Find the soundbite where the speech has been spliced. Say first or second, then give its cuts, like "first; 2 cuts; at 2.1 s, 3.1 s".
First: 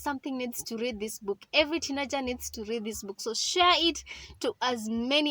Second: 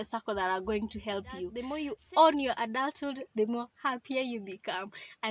second; 1 cut; at 1.4 s